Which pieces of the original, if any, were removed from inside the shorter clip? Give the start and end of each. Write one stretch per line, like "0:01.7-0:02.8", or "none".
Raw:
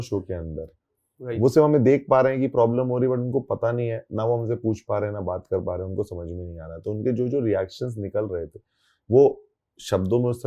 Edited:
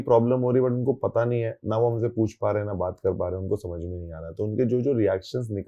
none